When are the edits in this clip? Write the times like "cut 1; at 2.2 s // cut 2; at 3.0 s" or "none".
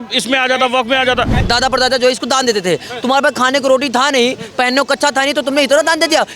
cut 1; at 1.4 s